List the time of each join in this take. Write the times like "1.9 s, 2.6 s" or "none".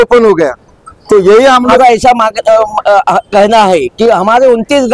1.7 s